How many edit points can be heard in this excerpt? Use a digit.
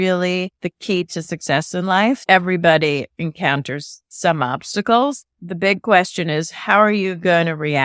2